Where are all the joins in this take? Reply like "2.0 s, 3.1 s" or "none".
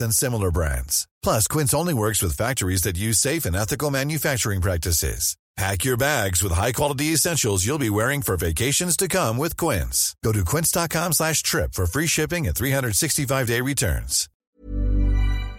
14.5 s